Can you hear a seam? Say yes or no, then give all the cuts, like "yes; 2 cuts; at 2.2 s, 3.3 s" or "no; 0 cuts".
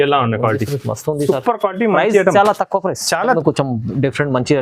yes; 1 cut; at 3.4 s